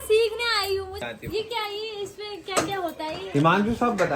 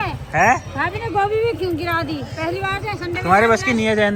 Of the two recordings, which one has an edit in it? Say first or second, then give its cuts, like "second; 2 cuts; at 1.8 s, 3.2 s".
first; 1 cut; at 1.0 s